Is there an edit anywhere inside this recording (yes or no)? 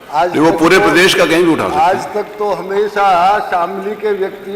no